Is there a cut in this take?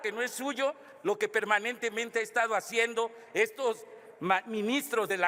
no; 0 cuts

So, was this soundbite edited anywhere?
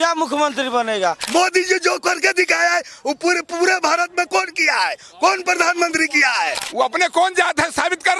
yes; 2 cuts; at 1.2 s, 6.6 s

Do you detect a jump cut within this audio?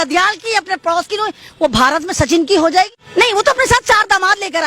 yes; 1 cut; at 3.0 s

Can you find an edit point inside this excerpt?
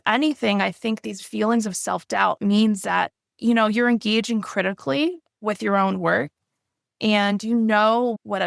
no; 0 cuts

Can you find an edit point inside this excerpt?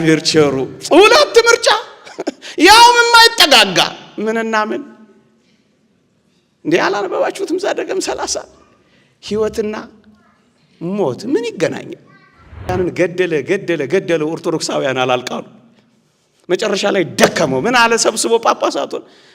yes; 1 cut; at 12.7 s

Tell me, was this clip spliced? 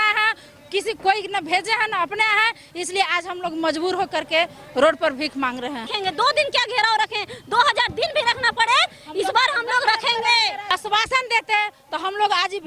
yes; 2 cuts; at 5.8 s, 10.7 s

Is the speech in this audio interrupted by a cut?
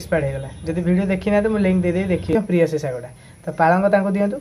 yes; 1 cut; at 2.3 s

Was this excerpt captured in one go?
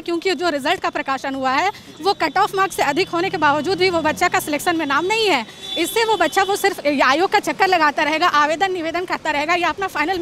yes; 0 cuts

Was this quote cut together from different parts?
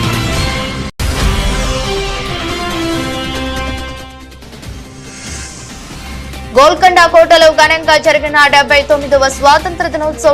yes; 1 cut; at 6.5 s

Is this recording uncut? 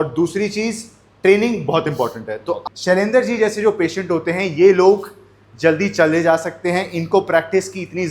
no; 1 cut; at 2.6 s

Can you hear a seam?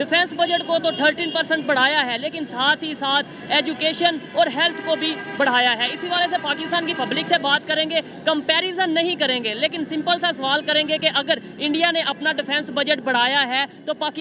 no; 0 cuts

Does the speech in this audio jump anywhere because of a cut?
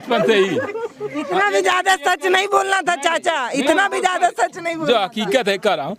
no; 0 cuts

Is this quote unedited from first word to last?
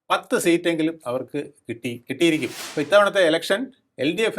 no; 1 cut; at 2.6 s

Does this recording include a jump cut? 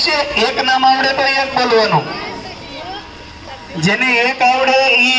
no; 0 cuts

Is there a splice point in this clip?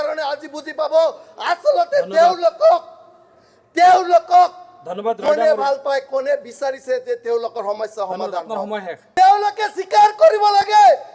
yes; 1 cut; at 9.0 s

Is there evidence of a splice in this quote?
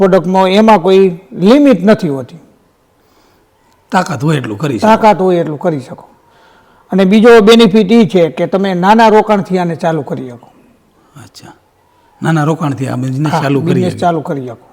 no; 0 cuts

